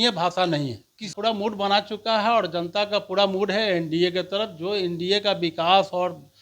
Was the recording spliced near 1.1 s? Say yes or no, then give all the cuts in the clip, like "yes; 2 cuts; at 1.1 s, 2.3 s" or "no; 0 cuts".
yes; 1 cut; at 1.1 s